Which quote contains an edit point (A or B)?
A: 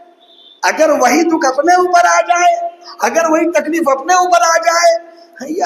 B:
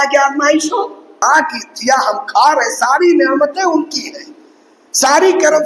B